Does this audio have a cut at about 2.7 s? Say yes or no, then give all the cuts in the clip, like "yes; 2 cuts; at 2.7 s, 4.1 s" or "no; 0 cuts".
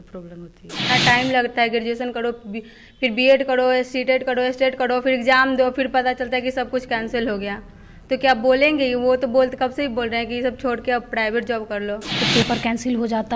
no; 2 cuts; at 0.8 s, 12.2 s